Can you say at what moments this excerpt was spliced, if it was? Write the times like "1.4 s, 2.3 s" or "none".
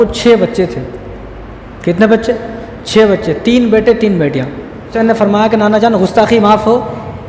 4.9 s